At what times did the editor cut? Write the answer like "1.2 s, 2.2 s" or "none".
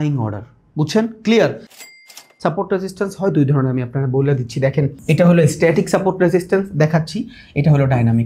1.9 s, 5.0 s